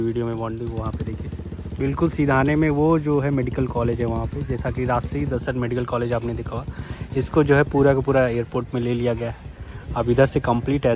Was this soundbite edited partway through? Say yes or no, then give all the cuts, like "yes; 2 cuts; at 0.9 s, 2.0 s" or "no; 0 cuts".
no; 0 cuts